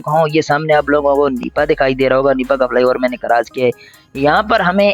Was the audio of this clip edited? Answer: no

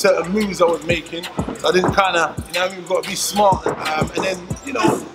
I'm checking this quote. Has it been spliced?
yes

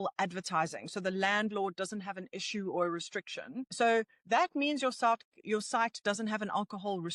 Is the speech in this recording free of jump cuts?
no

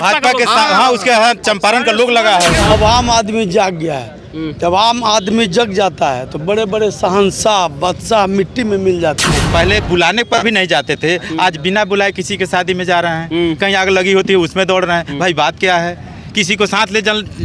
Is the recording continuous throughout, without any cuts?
no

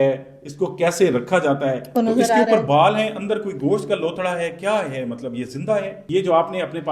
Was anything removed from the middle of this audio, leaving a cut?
yes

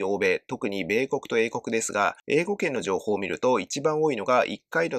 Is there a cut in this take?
no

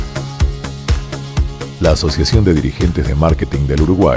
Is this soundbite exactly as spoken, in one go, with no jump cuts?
no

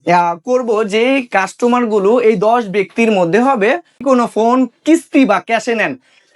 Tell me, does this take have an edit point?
yes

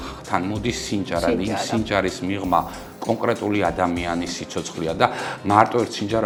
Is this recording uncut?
yes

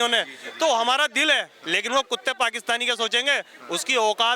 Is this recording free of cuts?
no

